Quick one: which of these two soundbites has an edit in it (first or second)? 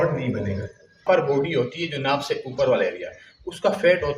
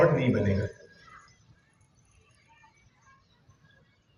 first